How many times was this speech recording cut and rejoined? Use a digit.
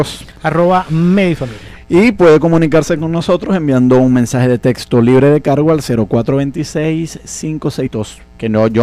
0